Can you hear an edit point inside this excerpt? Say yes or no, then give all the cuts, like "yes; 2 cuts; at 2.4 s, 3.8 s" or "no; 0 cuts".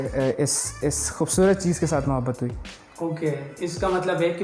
no; 0 cuts